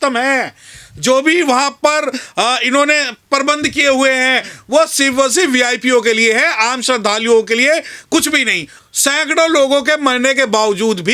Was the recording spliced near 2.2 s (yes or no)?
no